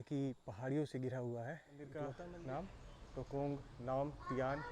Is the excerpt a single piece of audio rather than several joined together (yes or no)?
no